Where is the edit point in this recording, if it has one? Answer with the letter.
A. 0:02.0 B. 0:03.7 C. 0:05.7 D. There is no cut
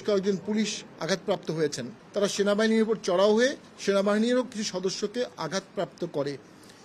A